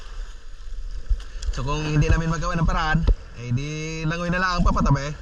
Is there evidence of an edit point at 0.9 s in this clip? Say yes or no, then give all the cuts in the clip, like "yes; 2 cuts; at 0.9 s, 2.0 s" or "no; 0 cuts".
no; 0 cuts